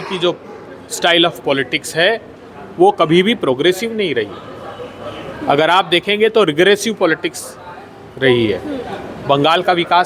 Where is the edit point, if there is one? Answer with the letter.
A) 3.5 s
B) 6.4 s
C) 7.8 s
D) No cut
D